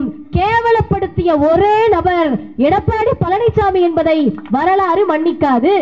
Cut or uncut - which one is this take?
uncut